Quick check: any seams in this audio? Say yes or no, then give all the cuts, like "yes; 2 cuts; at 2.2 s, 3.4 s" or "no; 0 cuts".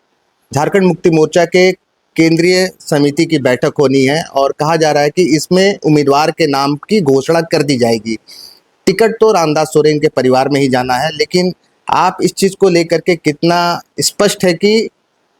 no; 0 cuts